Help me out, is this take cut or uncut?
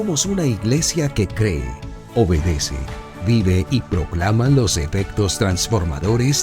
uncut